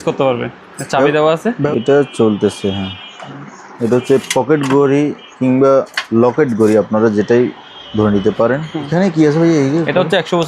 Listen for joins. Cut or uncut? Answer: cut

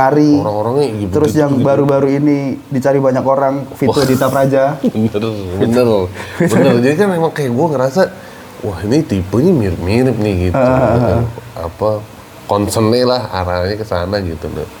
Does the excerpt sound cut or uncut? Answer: uncut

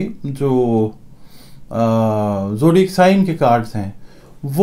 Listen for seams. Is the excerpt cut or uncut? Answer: uncut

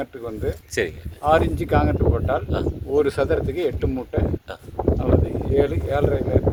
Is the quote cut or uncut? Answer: uncut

